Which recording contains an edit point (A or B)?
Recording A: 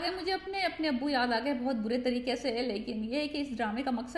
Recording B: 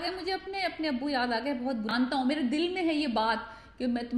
B